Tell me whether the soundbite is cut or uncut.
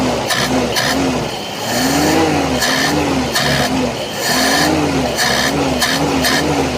uncut